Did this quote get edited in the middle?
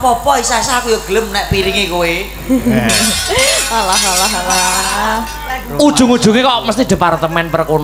no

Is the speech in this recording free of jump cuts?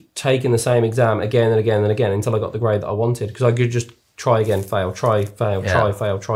yes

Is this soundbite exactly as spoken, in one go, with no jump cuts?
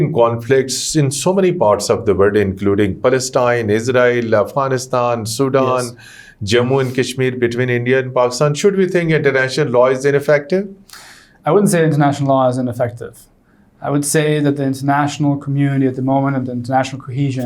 yes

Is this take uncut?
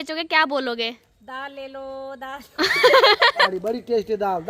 no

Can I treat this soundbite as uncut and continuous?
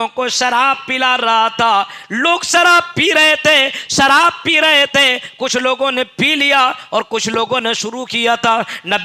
yes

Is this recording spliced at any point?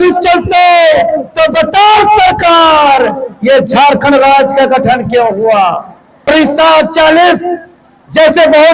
yes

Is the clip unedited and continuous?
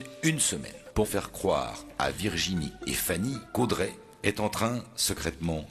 no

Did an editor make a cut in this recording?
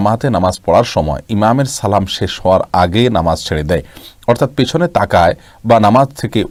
no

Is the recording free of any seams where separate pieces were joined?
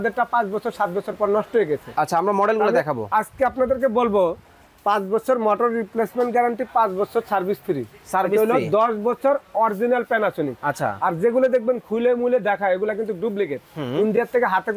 yes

